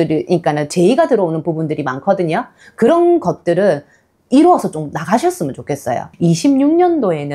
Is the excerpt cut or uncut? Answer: cut